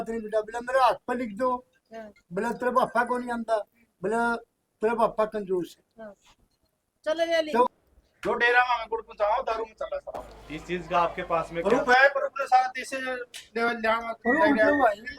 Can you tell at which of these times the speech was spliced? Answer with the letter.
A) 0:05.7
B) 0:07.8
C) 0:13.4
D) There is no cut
B